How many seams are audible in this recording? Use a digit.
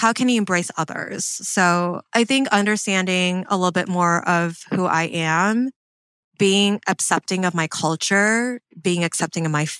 0